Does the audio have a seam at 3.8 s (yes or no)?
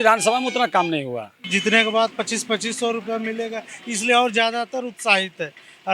no